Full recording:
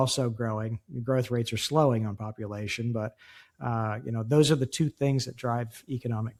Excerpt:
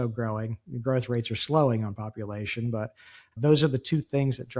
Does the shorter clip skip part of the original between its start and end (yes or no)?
yes